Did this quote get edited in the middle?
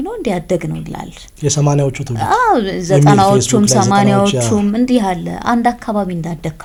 no; 0 cuts

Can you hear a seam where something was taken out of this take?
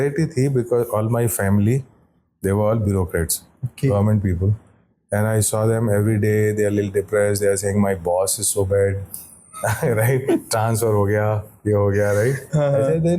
no; 0 cuts

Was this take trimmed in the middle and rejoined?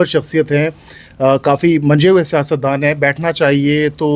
no; 0 cuts

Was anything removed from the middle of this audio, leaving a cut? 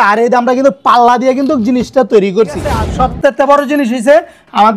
yes; 1 cut; at 2.8 s

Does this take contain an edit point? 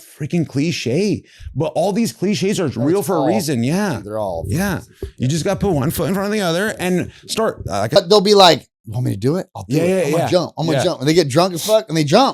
yes; 1 cut; at 8.0 s

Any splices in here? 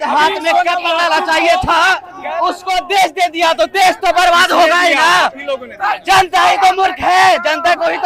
no; 0 cuts

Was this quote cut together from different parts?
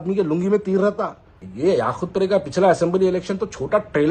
yes; 1 cut; at 1.4 s

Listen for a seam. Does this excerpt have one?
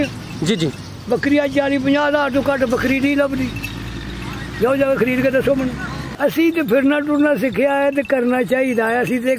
yes; 1 cut; at 6.1 s

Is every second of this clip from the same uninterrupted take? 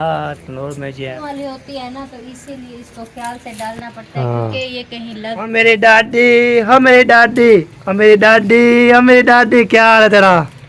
no; 2 cuts; at 1.2 s, 5.4 s

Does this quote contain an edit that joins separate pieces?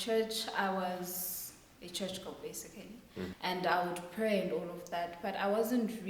yes; 1 cut; at 3.3 s

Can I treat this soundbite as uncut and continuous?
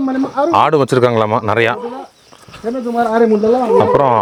yes; 0 cuts

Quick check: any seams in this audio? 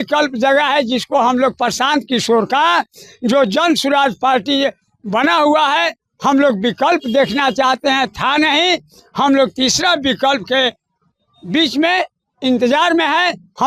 no; 0 cuts

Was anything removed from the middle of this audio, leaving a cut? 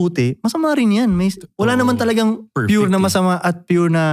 no; 0 cuts

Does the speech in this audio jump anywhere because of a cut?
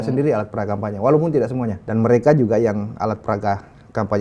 yes; 1 cut; at 1.8 s

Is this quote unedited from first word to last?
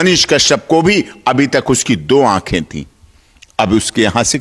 yes; 0 cuts

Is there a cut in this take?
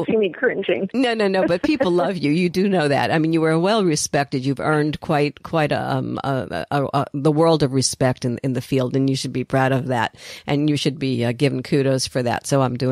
no; 0 cuts

